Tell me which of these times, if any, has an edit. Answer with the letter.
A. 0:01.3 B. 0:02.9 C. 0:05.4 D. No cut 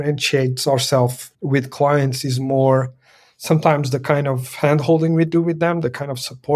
A